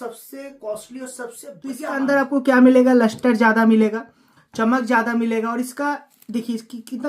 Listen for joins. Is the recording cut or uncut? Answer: cut